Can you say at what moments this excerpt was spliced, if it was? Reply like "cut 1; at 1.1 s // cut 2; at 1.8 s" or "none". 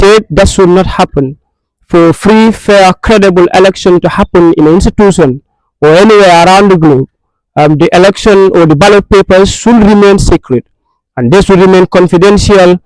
none